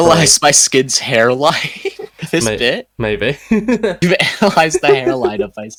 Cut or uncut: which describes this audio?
uncut